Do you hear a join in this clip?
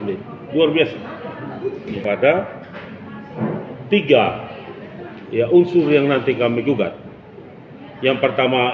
yes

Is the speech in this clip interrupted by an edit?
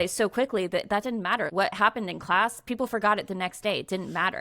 yes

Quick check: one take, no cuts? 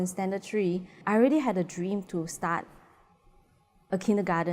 no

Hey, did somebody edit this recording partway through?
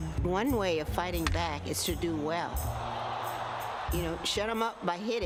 no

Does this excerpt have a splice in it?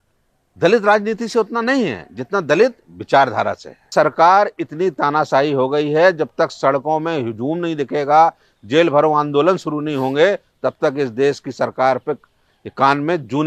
yes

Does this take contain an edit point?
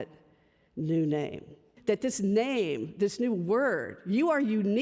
yes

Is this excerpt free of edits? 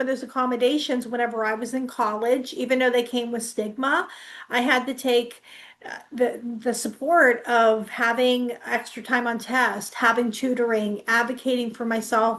yes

